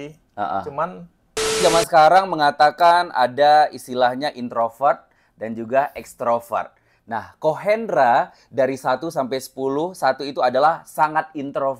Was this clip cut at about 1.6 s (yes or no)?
yes